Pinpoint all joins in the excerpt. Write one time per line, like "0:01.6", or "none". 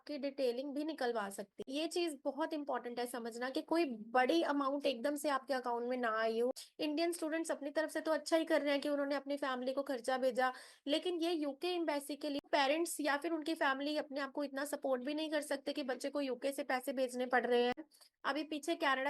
0:01.7
0:06.5
0:12.5
0:18.0